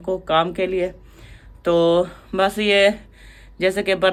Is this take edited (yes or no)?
no